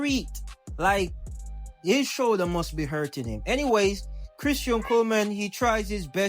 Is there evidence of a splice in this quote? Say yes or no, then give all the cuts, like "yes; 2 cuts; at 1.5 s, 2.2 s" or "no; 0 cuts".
yes; 1 cut; at 5.0 s